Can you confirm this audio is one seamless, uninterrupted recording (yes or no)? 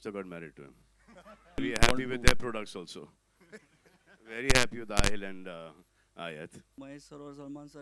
no